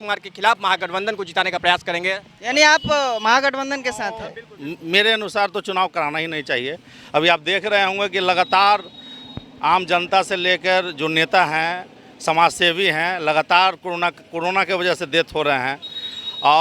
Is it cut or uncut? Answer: uncut